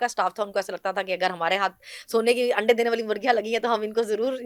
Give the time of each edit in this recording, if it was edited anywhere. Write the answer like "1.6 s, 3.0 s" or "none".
none